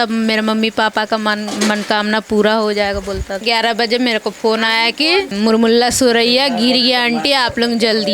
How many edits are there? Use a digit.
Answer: 2